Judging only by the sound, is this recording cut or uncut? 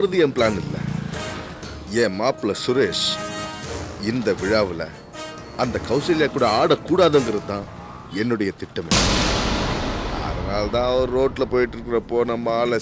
uncut